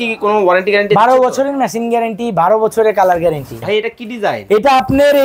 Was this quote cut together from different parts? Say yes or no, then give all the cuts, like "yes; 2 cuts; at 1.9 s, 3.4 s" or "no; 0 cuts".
yes; 1 cut; at 3.6 s